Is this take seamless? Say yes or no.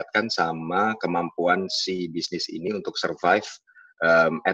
yes